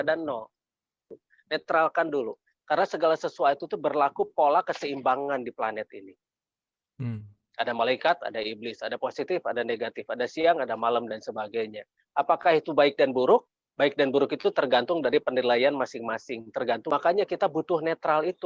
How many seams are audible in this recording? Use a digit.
2